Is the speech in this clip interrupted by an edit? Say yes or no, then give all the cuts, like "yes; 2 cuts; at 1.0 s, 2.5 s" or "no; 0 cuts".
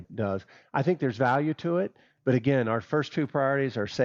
no; 0 cuts